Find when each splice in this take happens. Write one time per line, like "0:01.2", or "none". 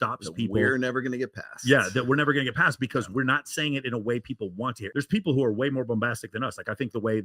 0:04.8